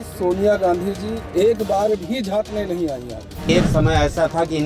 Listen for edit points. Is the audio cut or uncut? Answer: cut